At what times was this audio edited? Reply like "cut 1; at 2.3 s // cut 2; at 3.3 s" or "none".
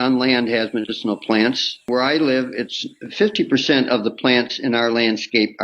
cut 1; at 1.9 s